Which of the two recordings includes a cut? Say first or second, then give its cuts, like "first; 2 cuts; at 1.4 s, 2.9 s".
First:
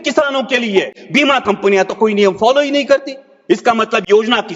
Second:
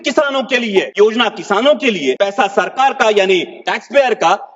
second; 2 cuts; at 0.9 s, 2.2 s